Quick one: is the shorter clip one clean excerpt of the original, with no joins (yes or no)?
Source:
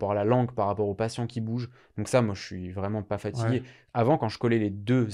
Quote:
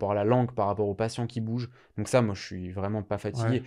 yes